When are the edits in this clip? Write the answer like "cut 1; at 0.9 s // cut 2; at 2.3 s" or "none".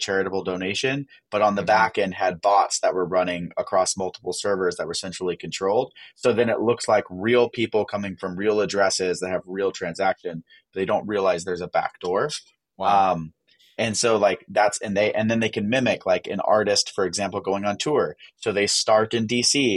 none